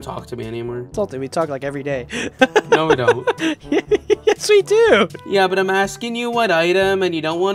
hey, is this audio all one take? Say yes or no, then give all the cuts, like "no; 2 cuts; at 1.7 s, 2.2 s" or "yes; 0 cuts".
no; 3 cuts; at 0.9 s, 3.5 s, 5.2 s